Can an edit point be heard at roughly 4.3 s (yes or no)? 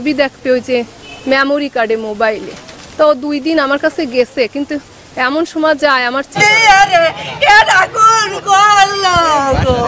no